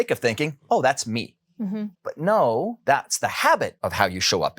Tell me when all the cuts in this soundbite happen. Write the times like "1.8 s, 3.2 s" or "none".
2.0 s, 2.8 s, 3.7 s